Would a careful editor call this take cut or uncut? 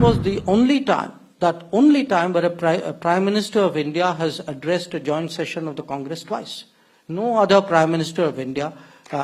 uncut